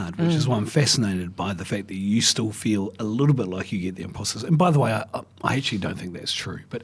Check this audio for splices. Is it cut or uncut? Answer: uncut